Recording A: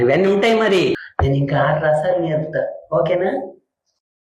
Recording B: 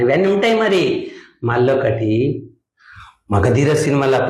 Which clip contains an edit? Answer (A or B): A